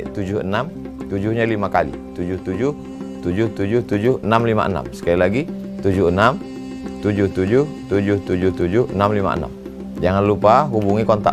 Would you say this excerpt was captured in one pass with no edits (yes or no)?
yes